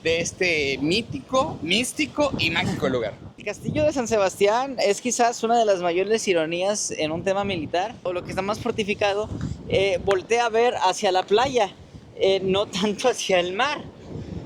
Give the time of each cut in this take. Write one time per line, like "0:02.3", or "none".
0:03.5
0:08.2